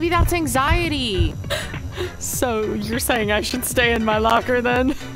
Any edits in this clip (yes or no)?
yes